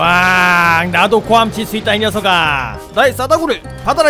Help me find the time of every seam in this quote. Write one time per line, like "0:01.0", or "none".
none